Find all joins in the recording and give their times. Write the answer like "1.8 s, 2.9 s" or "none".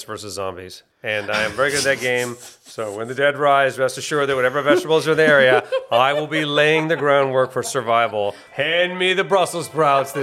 8.5 s